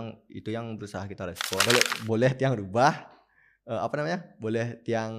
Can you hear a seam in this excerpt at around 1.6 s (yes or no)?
yes